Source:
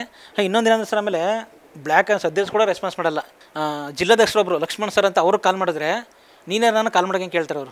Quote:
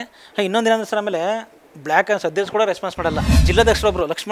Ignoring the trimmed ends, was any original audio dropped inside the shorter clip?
yes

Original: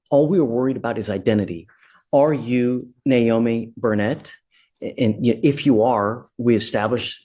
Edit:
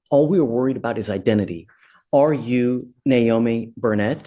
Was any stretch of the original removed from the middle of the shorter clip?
no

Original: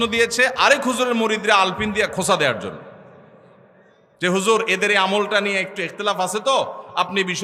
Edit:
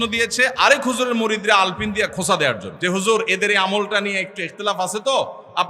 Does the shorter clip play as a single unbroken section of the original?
no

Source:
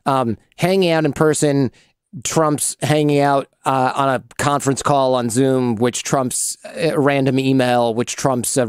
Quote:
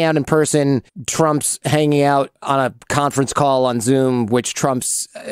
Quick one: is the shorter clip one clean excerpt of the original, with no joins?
no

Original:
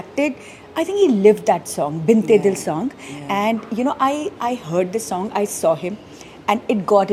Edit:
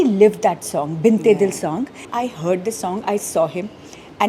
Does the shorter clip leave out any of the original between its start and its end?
yes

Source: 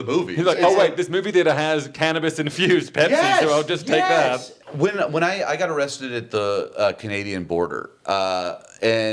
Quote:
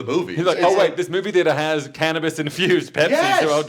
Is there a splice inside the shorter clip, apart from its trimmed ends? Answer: no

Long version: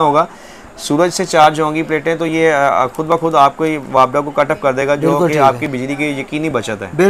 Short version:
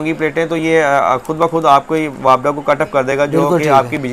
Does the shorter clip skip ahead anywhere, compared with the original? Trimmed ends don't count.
no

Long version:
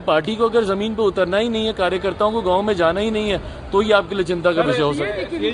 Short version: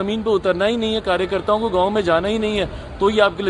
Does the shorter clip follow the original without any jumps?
yes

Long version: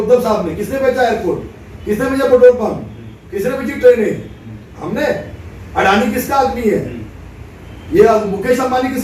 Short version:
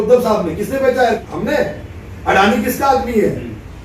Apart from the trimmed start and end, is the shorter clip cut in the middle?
yes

